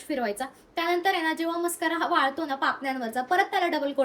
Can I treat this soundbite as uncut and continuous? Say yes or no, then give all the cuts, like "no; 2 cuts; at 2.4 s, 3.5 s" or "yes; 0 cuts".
yes; 0 cuts